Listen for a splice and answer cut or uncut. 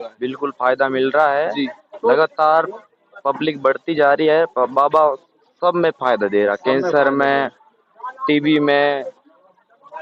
uncut